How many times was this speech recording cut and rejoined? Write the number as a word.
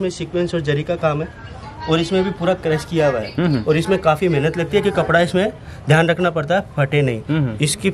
zero